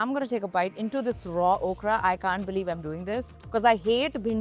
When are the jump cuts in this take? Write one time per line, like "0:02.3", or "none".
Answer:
none